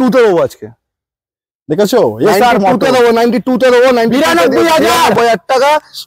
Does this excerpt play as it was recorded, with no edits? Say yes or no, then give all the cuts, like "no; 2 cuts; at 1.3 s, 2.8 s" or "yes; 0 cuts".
yes; 0 cuts